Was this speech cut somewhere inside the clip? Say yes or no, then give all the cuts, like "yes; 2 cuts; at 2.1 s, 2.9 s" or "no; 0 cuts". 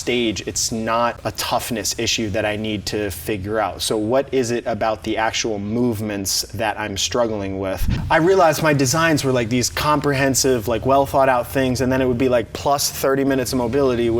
yes; 2 cuts; at 1.2 s, 7.9 s